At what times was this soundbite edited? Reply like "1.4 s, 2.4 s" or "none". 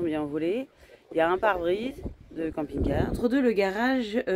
3.2 s